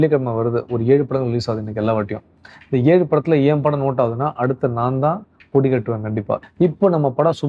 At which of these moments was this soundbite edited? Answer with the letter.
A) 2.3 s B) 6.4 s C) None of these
B